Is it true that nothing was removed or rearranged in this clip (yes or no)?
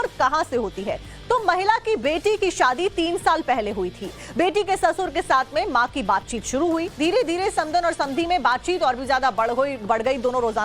yes